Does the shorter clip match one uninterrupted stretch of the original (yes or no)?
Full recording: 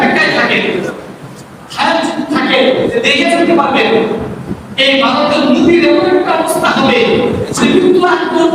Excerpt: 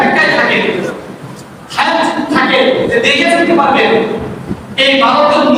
yes